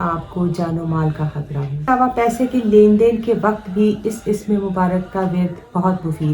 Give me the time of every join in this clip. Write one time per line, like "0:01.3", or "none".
0:01.9